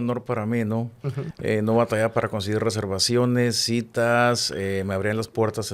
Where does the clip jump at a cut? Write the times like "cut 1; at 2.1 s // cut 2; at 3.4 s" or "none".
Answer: cut 1; at 1.2 s

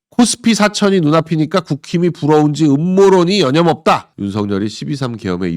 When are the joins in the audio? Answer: cut 1; at 4.1 s

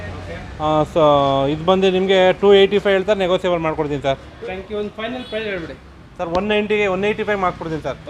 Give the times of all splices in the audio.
cut 1; at 4.3 s

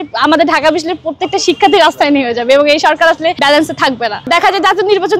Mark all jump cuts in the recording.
none

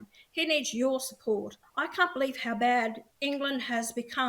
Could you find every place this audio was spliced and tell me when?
cut 1; at 1.6 s

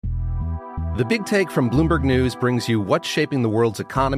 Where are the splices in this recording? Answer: cut 1; at 1.0 s

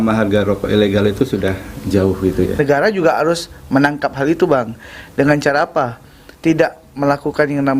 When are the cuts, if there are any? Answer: cut 1; at 2.5 s

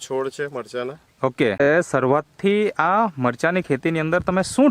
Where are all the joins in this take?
cut 1; at 1.7 s

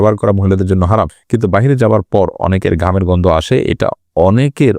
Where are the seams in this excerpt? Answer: cut 1; at 1.2 s

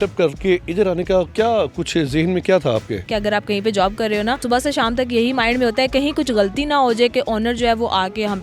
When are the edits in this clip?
cut 1; at 3.1 s // cut 2; at 4.4 s

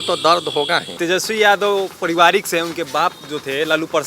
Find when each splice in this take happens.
cut 1; at 1.0 s

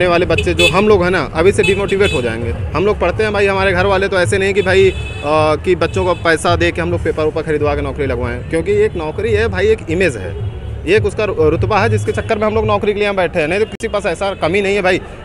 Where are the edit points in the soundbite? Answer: none

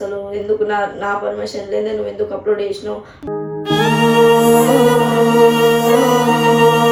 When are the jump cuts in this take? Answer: none

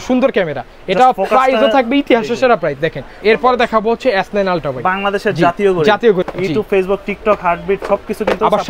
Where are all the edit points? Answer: cut 1; at 3.1 s // cut 2; at 6.2 s

